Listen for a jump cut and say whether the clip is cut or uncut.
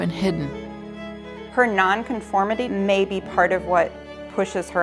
cut